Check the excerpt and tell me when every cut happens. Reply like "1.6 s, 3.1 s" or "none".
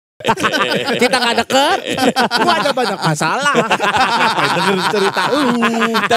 none